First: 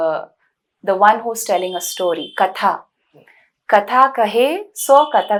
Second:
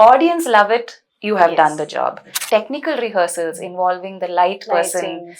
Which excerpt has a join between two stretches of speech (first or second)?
second